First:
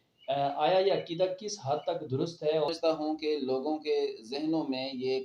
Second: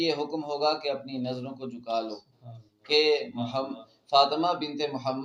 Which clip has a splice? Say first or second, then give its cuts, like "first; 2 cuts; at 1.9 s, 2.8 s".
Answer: first; 1 cut; at 2.7 s